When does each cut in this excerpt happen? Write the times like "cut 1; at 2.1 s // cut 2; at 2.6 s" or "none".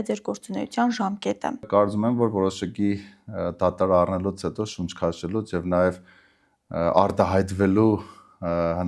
cut 1; at 1.7 s